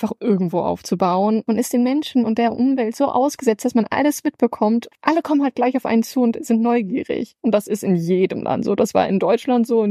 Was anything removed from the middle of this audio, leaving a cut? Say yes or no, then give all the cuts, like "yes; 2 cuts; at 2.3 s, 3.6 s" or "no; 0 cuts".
yes; 2 cuts; at 1.4 s, 4.9 s